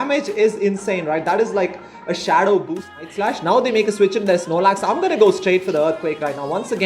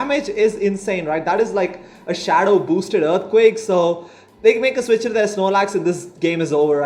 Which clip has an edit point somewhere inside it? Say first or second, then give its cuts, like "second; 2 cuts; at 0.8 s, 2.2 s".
first; 1 cut; at 2.9 s